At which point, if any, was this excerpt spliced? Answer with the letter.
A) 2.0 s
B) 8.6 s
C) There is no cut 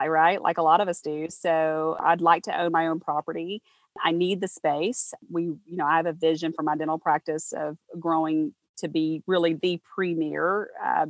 A